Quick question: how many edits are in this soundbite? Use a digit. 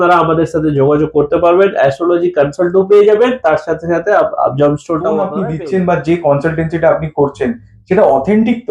1